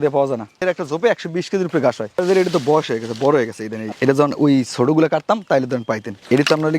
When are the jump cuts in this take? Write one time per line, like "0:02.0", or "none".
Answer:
0:02.2